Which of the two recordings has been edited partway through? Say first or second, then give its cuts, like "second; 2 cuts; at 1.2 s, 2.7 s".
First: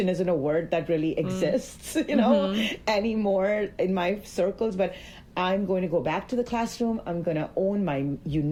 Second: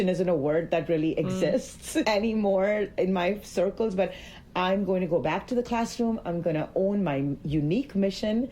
second; 1 cut; at 2.0 s